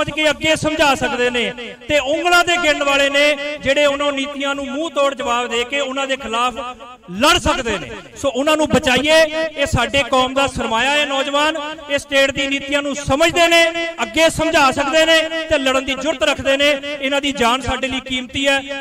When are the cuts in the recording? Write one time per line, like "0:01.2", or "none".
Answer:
none